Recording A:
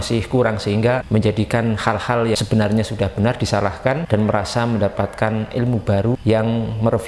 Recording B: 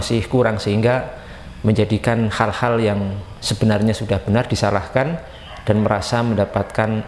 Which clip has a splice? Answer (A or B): A